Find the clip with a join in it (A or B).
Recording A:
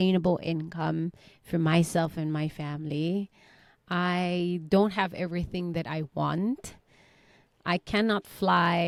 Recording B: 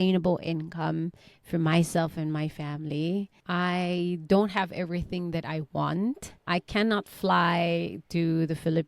B